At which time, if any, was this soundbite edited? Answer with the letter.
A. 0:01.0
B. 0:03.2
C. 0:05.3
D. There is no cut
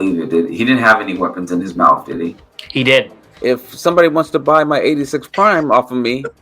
B